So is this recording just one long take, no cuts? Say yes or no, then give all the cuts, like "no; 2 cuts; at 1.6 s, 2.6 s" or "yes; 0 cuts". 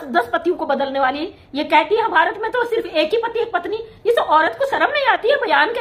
yes; 0 cuts